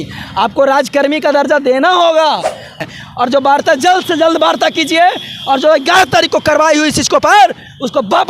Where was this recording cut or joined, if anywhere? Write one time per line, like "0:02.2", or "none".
0:02.8